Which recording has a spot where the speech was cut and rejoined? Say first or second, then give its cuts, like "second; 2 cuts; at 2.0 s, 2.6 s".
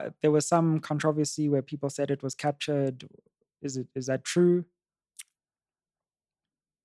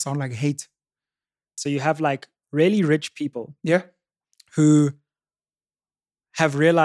second; 1 cut; at 1.5 s